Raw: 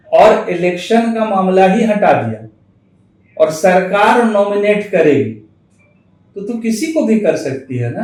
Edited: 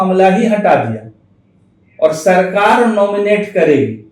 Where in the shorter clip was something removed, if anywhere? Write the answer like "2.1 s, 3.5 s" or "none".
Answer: none